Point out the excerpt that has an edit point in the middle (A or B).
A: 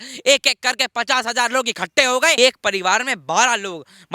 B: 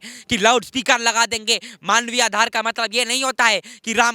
A